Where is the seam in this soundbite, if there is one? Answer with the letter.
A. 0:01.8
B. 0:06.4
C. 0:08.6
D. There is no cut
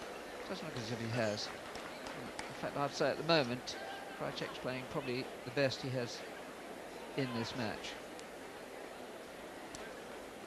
B